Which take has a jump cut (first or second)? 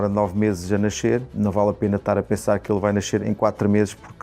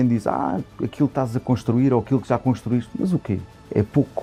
first